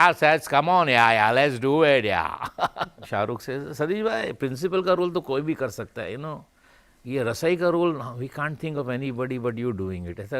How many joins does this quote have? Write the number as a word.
one